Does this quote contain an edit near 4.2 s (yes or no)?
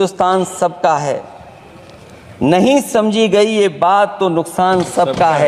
no